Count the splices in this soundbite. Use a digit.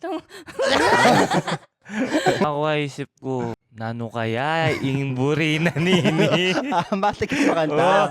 2